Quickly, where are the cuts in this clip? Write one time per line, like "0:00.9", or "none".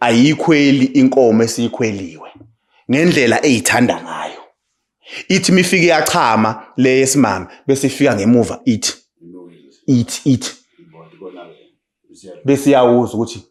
none